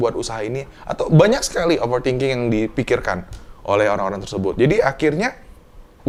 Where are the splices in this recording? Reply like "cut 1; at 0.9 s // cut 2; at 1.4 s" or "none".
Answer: none